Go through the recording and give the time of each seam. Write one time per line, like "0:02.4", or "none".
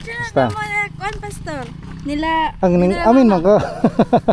none

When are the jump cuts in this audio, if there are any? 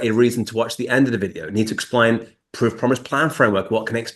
none

